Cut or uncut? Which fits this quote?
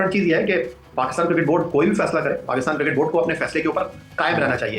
uncut